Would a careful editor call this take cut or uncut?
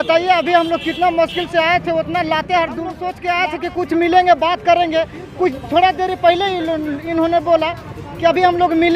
cut